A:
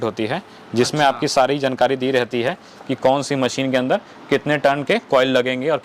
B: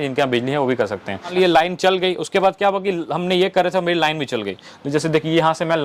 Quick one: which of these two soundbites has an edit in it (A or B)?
B